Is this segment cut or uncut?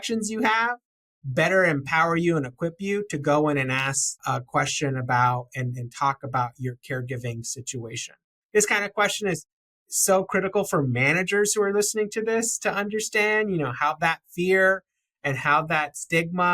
cut